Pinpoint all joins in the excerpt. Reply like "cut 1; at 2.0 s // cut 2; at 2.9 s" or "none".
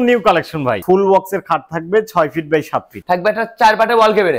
cut 1; at 0.8 s // cut 2; at 2.9 s